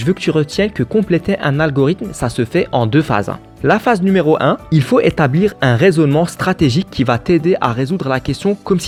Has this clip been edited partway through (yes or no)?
no